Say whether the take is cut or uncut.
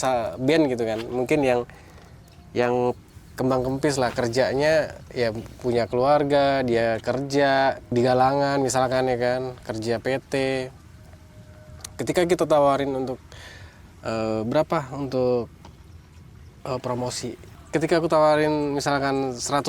cut